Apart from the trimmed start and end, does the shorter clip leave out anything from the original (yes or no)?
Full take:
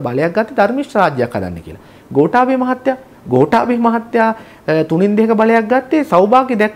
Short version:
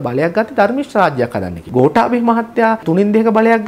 yes